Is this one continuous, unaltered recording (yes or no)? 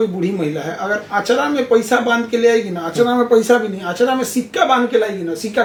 yes